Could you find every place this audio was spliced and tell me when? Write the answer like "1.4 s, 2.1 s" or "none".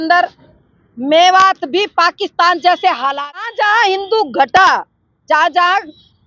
3.4 s